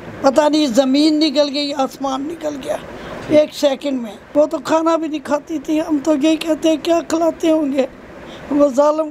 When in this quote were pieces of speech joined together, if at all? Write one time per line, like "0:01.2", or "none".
0:04.2